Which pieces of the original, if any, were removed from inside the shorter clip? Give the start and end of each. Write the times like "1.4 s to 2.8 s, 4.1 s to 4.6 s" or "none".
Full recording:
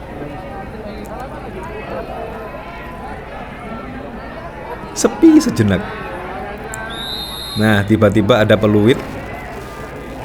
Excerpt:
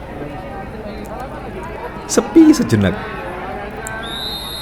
1.8 s to 4.6 s